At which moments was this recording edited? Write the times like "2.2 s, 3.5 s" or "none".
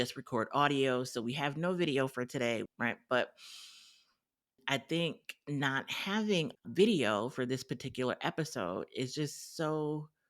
4.6 s